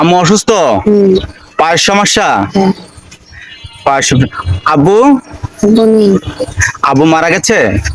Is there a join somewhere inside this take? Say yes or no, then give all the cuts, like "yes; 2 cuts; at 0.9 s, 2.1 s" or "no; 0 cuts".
no; 0 cuts